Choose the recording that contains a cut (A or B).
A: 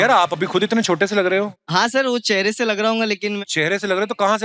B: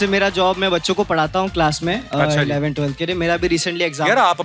A